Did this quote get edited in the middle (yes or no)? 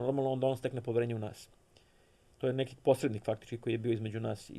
no